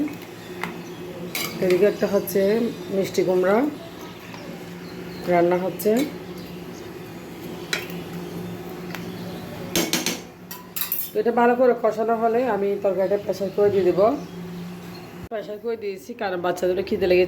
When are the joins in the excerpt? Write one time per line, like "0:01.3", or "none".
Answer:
0:15.3